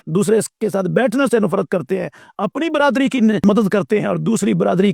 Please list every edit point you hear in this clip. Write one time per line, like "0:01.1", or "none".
none